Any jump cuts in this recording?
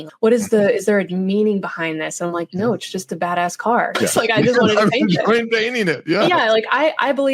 no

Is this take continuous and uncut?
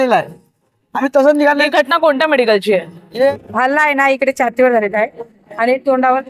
no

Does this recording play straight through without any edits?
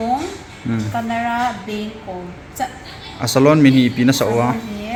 yes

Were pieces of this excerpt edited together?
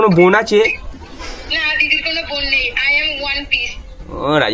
no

